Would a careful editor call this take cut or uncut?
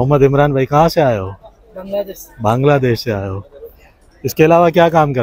uncut